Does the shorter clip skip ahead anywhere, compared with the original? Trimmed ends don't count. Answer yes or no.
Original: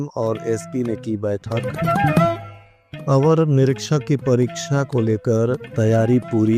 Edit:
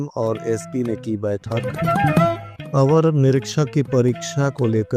yes